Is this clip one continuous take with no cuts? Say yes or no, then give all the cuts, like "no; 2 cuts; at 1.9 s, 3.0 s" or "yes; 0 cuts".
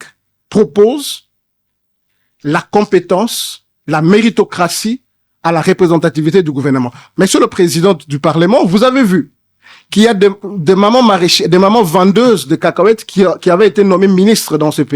yes; 0 cuts